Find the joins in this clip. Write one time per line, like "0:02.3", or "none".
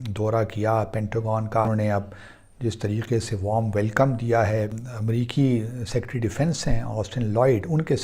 0:01.7
0:04.9